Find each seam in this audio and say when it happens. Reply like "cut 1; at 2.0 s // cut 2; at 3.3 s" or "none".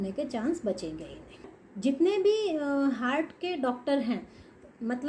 cut 1; at 1.6 s

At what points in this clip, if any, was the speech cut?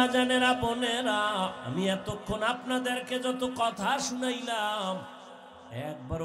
cut 1; at 1.6 s

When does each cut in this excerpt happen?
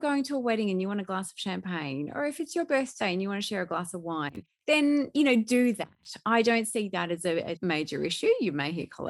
cut 1; at 7.5 s

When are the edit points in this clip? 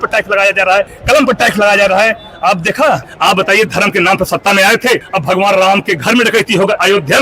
cut 1; at 1.0 s // cut 2; at 3.1 s // cut 3; at 5.1 s

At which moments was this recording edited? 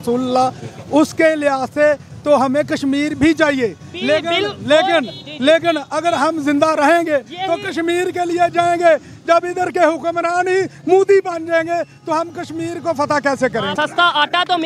cut 1; at 13.7 s

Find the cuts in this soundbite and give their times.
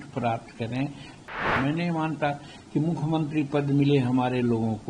cut 1; at 1.3 s

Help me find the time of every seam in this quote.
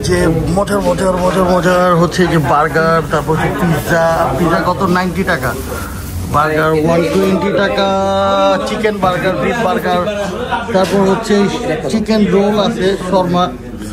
none

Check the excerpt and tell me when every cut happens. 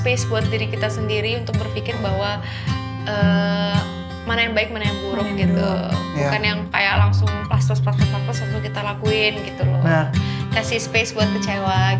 none

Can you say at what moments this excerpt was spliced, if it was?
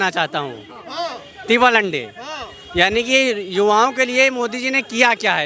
none

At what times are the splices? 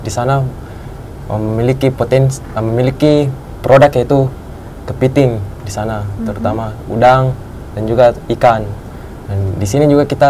none

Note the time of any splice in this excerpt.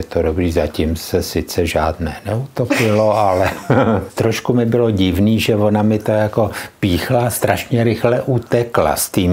cut 1; at 4.1 s

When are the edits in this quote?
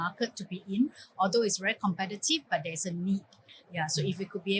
none

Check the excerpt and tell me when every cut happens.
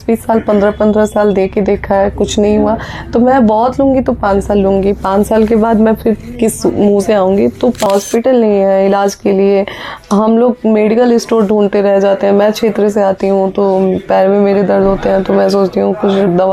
cut 1; at 7.9 s

